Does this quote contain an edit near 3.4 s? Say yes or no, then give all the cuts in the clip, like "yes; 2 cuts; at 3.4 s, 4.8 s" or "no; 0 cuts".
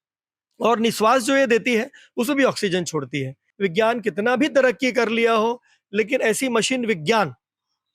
yes; 1 cut; at 3.4 s